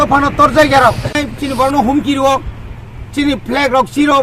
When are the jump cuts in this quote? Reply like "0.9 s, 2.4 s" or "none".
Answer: 1.2 s

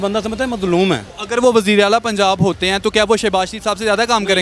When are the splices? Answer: 1.1 s

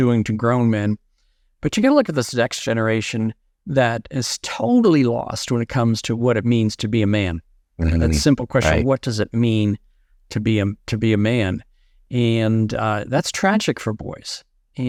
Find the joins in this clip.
none

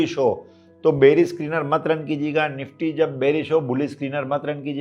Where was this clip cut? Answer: none

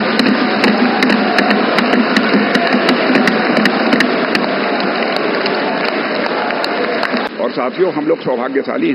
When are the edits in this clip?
7.3 s

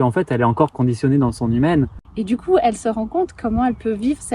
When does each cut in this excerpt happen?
2.0 s

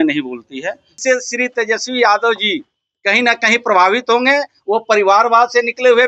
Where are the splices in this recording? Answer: 0.9 s

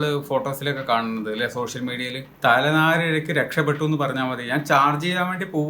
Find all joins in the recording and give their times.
2.2 s

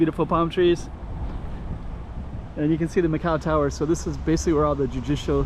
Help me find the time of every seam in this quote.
2.4 s

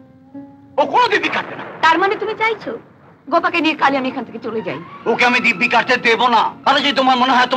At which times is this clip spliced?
6.6 s

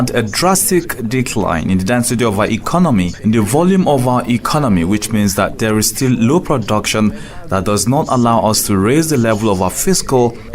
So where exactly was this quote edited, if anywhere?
3.1 s

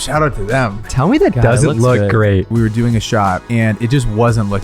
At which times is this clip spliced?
0.9 s, 2.5 s, 3.4 s

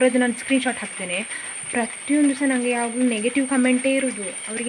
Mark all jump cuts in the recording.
none

